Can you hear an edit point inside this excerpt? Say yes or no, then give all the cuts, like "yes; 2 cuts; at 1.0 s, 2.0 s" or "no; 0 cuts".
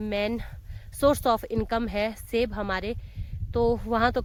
no; 0 cuts